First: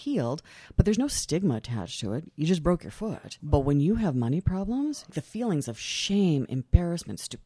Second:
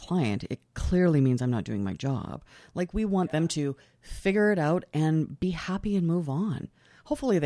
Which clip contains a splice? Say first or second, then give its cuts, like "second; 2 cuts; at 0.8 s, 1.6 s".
first; 2 cuts; at 3.4 s, 5.2 s